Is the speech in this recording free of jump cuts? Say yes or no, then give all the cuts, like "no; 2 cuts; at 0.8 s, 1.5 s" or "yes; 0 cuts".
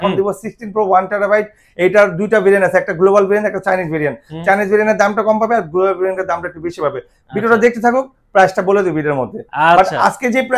yes; 0 cuts